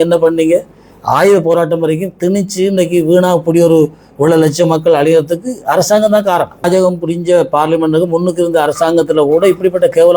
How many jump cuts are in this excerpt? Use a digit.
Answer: 1